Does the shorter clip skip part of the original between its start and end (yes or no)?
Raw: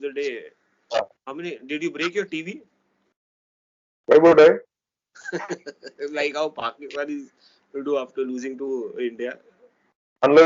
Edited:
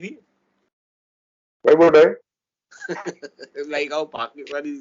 no